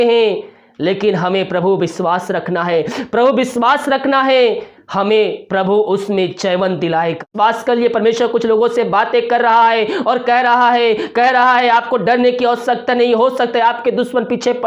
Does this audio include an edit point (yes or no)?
yes